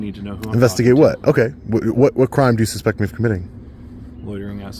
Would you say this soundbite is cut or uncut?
uncut